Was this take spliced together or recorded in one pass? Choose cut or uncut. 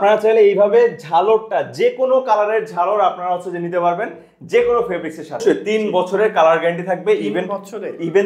cut